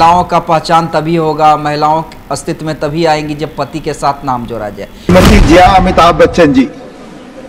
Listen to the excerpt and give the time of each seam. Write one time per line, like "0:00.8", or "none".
0:04.9